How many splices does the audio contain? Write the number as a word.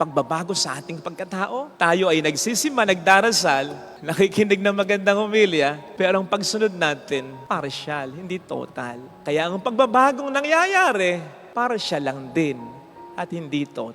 one